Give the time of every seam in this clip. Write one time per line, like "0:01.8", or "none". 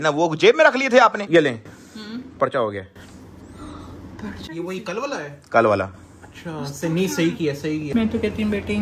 0:01.2
0:07.9